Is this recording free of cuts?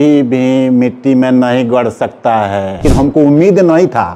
no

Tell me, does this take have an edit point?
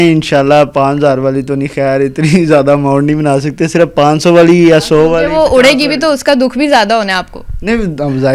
no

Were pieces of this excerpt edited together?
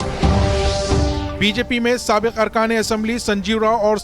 yes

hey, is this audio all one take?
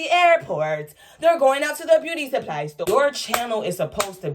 no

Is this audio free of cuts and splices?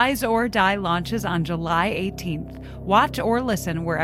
yes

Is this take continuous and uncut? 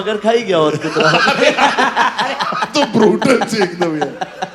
yes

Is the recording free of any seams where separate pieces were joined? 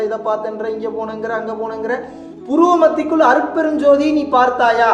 yes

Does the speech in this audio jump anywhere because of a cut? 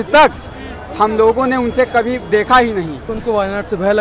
yes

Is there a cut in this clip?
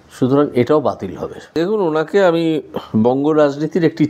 yes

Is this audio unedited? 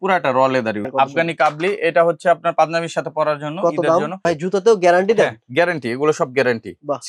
no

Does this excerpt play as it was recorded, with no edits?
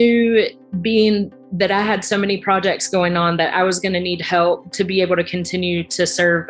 yes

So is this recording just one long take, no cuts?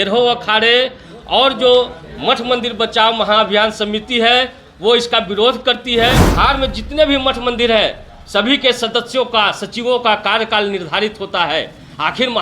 no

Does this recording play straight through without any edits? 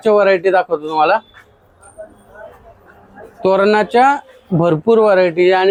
yes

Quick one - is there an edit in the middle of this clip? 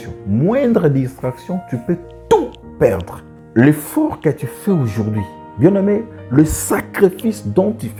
no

